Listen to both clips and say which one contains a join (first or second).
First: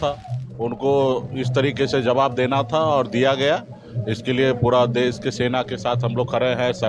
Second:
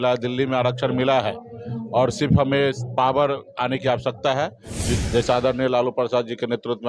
second